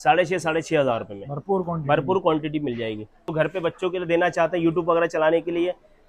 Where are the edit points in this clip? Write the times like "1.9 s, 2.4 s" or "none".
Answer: 3.3 s